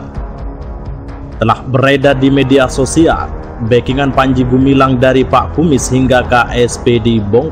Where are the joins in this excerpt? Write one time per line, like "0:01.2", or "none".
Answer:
none